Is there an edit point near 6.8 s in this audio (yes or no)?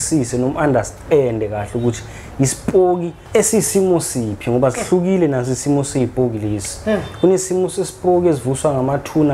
no